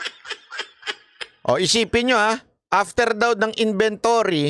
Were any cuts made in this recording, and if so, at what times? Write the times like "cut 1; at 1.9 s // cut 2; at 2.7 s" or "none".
cut 1; at 0.9 s